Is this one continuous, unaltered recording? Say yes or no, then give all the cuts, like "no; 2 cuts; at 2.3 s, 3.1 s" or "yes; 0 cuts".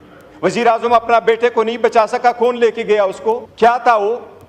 no; 1 cut; at 3.5 s